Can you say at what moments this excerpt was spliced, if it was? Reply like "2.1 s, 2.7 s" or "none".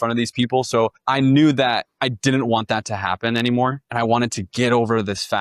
1.0 s, 1.9 s, 3.8 s